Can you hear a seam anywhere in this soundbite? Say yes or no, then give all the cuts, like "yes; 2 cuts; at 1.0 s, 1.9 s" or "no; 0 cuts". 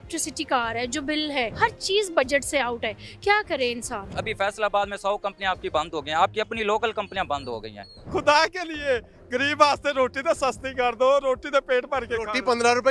yes; 3 cuts; at 1.5 s, 4.1 s, 8.1 s